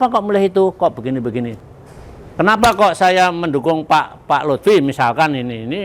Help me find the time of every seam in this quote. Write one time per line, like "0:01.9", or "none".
0:01.5